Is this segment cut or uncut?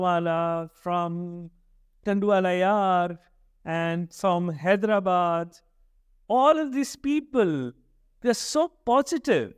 uncut